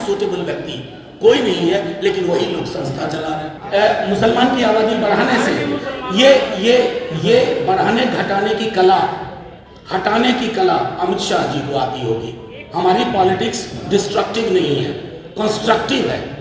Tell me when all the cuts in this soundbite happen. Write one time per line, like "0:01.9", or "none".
0:03.6